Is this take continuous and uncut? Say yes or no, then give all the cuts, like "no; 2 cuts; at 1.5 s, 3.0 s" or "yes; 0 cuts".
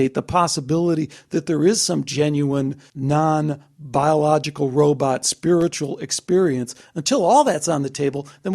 no; 1 cut; at 2.9 s